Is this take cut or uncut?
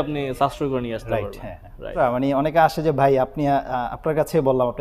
cut